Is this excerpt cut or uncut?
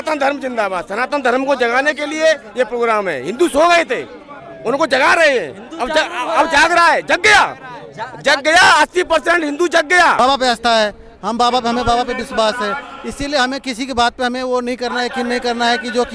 cut